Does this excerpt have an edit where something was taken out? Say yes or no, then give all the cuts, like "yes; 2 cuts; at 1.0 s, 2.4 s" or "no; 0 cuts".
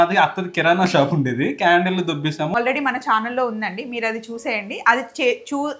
yes; 1 cut; at 2.5 s